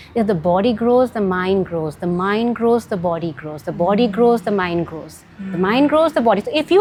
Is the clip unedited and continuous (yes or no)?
yes